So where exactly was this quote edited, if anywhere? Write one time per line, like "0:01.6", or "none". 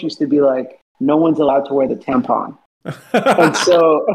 none